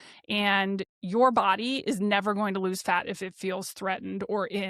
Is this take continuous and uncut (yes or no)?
no